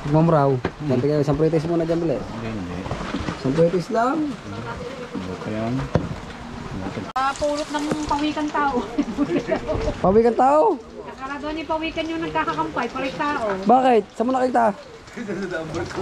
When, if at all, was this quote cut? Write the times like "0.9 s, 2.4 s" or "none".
7.2 s